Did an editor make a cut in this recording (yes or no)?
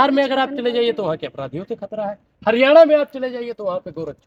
no